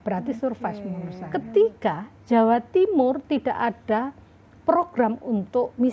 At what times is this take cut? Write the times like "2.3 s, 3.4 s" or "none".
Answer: 1.1 s